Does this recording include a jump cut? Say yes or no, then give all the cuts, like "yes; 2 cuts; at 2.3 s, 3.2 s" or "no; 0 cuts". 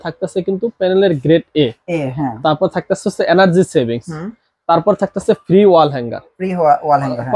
no; 0 cuts